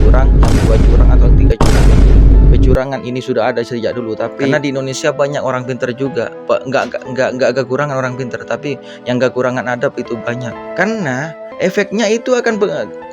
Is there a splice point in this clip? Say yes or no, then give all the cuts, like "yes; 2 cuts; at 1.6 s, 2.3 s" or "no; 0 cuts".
yes; 2 cuts; at 4.5 s, 10.6 s